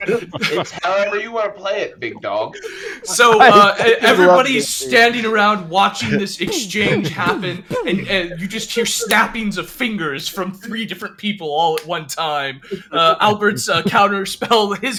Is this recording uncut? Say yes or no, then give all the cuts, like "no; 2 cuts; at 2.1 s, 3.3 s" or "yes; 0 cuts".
yes; 0 cuts